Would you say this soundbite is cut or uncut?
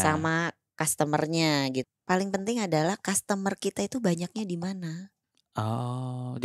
cut